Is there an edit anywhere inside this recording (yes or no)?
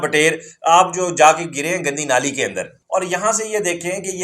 yes